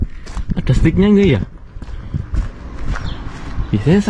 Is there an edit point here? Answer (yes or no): no